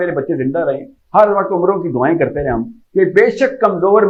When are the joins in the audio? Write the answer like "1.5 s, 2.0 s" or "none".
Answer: none